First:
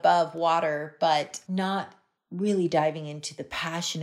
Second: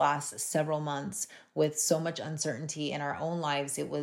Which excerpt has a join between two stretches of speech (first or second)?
first